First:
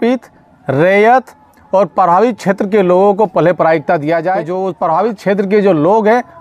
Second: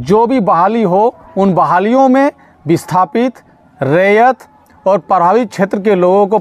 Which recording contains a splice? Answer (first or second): first